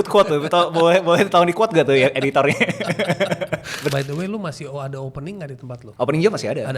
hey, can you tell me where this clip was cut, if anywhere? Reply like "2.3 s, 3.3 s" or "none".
3.9 s, 5.8 s